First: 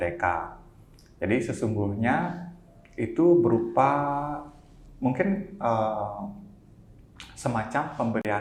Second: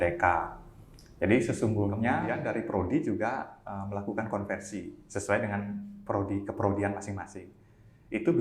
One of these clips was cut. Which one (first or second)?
second